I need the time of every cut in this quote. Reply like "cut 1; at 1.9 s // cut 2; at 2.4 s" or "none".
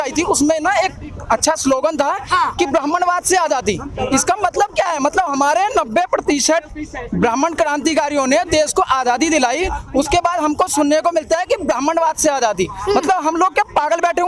none